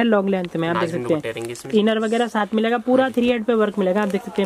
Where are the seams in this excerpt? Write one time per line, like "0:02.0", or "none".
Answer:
none